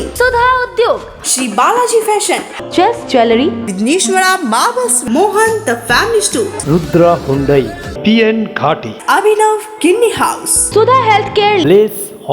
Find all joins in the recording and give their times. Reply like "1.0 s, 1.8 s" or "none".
10.5 s